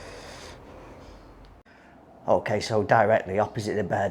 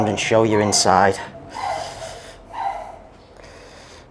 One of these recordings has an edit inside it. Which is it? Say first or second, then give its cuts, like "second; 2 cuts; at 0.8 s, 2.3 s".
first; 1 cut; at 1.5 s